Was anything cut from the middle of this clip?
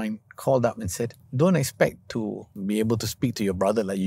yes; 2 cuts; at 1.2 s, 2.6 s

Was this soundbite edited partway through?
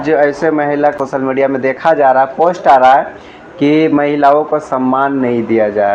yes; 1 cut; at 0.9 s

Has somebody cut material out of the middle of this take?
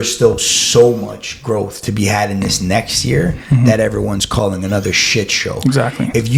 no; 0 cuts

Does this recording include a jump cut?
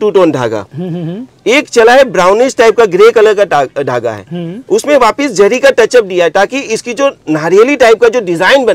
no; 0 cuts

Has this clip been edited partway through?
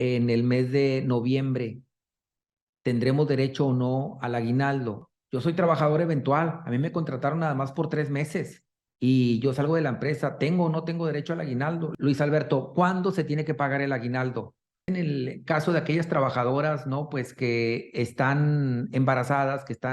yes; 3 cuts; at 5.0 s, 11.9 s, 14.8 s

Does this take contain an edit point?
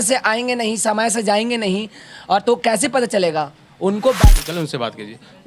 yes; 1 cut; at 4.2 s

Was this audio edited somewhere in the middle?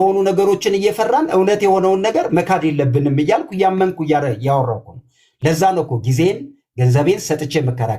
no; 0 cuts

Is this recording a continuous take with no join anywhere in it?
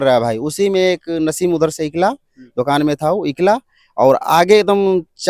yes; 0 cuts

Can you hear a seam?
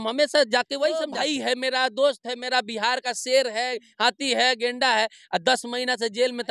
yes; 1 cut; at 1.2 s

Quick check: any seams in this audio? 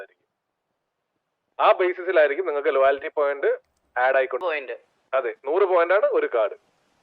yes; 1 cut; at 4.4 s

